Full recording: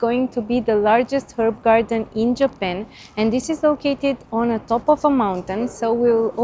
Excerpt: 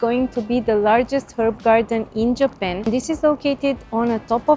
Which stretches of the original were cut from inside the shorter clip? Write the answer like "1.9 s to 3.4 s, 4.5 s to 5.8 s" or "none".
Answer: 2.9 s to 3.3 s